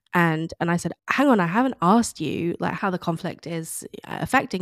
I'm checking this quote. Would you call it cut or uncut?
cut